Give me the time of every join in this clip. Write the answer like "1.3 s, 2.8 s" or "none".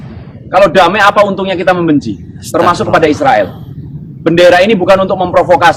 none